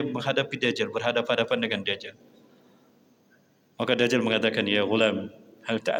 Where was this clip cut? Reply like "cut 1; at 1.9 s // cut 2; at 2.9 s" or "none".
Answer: none